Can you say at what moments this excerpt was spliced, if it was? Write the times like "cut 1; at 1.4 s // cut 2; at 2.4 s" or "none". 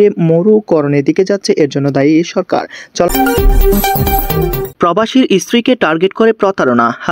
cut 1; at 3.1 s // cut 2; at 4.7 s